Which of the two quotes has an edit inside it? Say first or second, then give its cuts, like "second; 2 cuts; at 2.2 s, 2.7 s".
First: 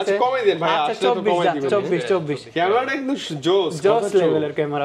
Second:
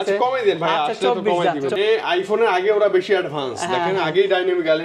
second; 1 cut; at 1.8 s